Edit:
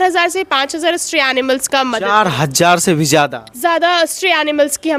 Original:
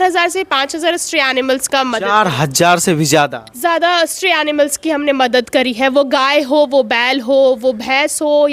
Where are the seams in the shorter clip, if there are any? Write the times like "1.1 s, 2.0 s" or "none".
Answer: none